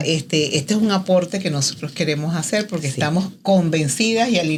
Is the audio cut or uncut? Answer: uncut